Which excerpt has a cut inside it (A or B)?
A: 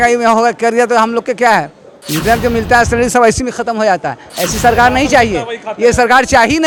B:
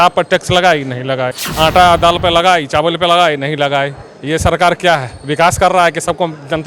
B